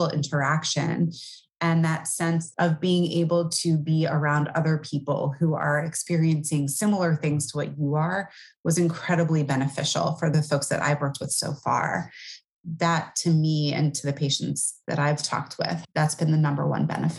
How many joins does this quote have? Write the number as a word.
three